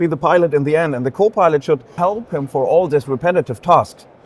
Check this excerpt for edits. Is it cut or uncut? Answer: cut